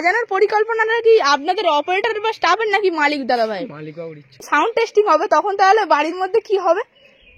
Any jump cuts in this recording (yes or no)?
yes